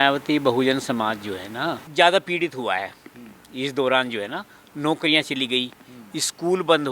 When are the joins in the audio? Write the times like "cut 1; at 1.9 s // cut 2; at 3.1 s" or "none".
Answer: cut 1; at 1.8 s

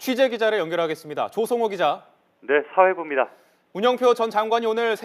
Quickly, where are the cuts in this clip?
cut 1; at 3.9 s

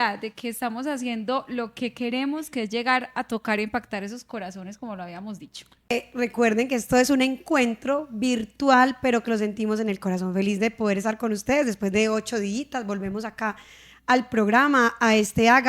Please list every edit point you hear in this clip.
cut 1; at 5.8 s

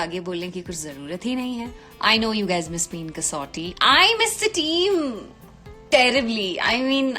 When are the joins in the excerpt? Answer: cut 1; at 1.8 s

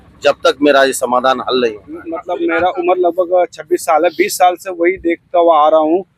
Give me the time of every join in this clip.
cut 1; at 2.2 s

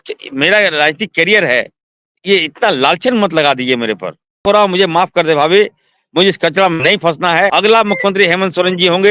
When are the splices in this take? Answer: cut 1; at 4.4 s // cut 2; at 7.6 s

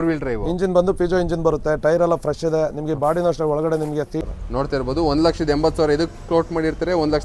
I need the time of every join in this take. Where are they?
cut 1; at 4.1 s

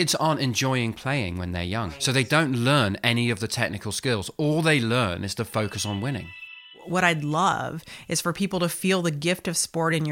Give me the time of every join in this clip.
cut 1; at 1.9 s // cut 2; at 6.8 s

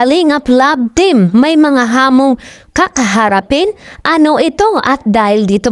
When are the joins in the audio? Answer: none

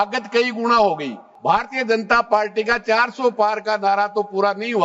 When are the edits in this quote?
cut 1; at 1.3 s

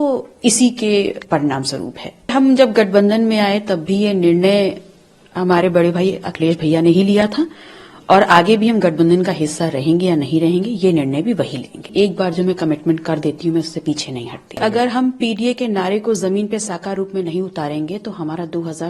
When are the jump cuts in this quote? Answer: cut 1; at 2.3 s // cut 2; at 11.8 s // cut 3; at 14.6 s

